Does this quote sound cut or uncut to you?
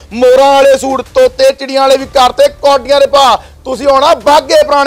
uncut